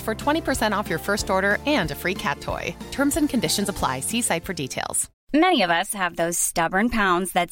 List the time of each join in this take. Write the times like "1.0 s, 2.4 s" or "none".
5.1 s